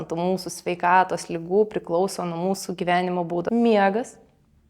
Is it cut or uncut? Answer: cut